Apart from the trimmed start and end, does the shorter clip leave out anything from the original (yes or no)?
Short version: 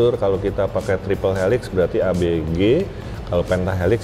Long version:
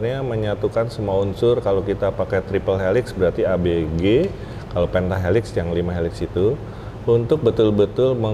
no